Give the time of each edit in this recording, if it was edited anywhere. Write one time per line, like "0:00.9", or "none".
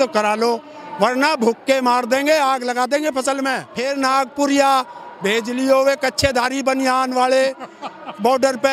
0:03.7

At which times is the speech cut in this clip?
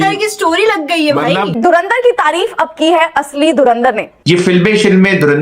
0:01.5
0:04.1

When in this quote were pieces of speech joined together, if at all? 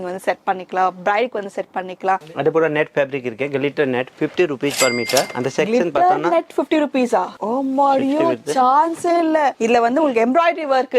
0:02.2
0:07.4
0:09.6

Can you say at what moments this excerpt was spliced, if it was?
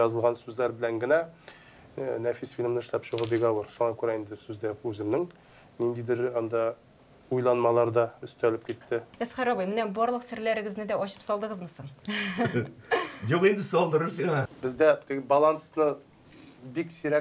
0:09.1
0:14.5

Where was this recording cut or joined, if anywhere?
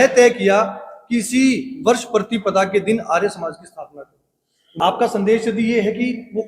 0:04.7

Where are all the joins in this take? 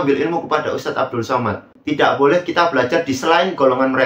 0:01.7

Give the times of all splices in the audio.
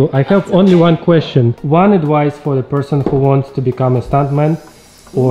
0:01.6

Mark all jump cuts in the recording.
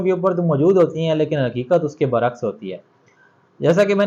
none

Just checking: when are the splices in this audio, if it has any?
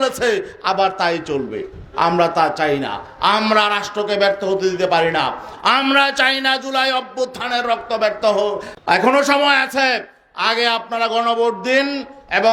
0:08.7

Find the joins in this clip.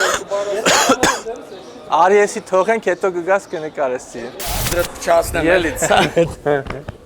0:04.7

